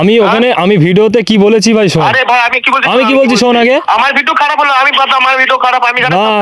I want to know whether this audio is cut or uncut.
uncut